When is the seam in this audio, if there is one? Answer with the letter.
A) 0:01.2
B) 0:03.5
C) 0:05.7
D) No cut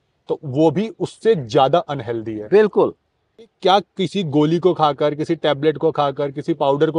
B